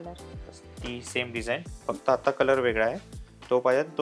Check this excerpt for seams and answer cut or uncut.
uncut